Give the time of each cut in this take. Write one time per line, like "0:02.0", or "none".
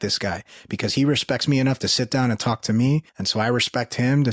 0:03.2